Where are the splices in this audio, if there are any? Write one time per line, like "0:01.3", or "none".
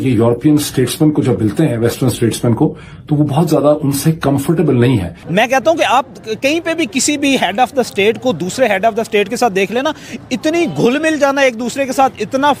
0:05.2